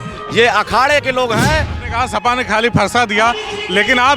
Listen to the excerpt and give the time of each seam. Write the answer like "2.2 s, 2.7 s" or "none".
1.8 s